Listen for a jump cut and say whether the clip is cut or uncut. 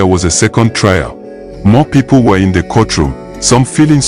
cut